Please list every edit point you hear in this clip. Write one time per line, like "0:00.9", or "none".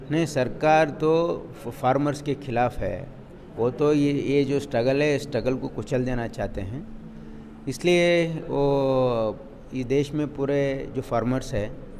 none